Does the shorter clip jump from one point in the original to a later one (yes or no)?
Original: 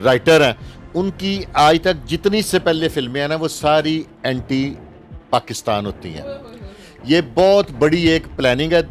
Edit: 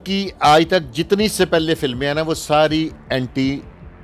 no